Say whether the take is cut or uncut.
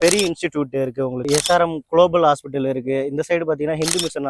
cut